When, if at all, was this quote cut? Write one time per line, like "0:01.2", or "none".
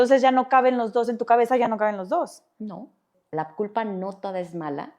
0:03.1